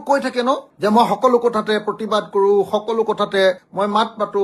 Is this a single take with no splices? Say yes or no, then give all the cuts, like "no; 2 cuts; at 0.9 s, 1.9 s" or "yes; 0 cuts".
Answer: yes; 0 cuts